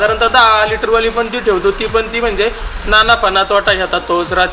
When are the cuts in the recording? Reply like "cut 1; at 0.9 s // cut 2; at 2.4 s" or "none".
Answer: none